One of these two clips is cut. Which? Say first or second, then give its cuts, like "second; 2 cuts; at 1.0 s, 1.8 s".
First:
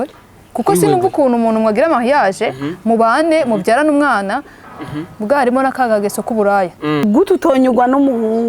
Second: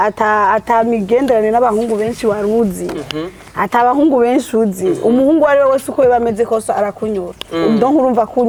first; 1 cut; at 7.0 s